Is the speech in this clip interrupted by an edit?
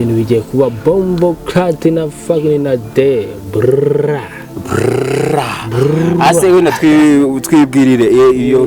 no; 0 cuts

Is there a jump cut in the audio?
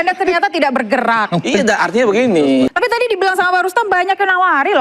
yes; 1 cut; at 2.7 s

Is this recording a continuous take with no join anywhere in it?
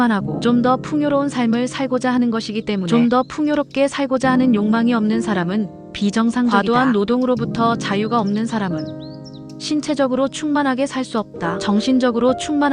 no; 3 cuts; at 2.8 s, 6.5 s, 11.6 s

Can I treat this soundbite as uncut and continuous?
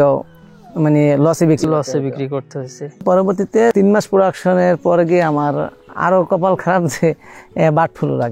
no; 1 cut; at 2.9 s

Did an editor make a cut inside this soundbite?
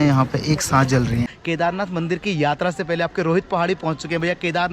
yes; 1 cut; at 1.4 s

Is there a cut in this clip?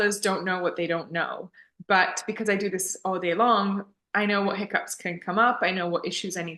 no; 0 cuts

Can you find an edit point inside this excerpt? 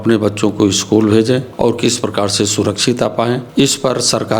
yes; 2 cuts; at 1.5 s, 3.5 s

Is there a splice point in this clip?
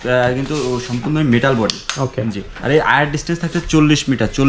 no; 0 cuts

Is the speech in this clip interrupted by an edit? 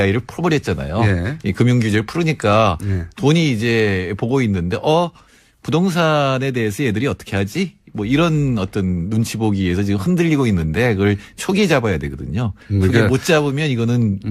yes; 1 cut; at 2.8 s

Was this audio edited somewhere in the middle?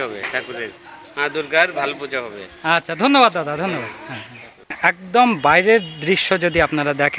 no; 0 cuts

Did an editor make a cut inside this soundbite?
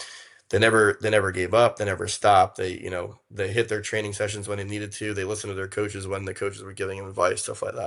no; 0 cuts

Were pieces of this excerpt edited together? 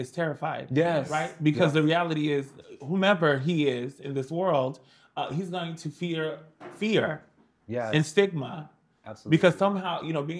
no; 0 cuts

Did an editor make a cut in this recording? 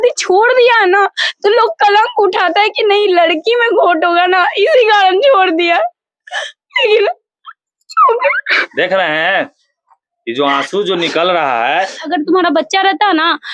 yes; 1 cut; at 12.1 s

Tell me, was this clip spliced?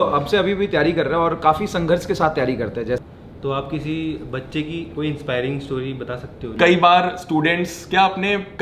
yes; 2 cuts; at 3.0 s, 6.5 s

